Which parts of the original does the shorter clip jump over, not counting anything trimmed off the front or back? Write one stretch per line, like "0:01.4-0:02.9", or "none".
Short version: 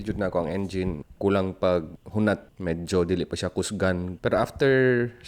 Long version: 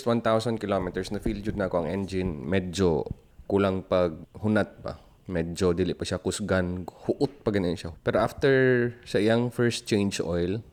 0:02.4-0:03.3
0:04.8-0:05.2
0:06.8-0:07.9